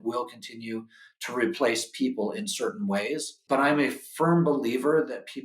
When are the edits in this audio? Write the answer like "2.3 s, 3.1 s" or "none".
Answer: 3.3 s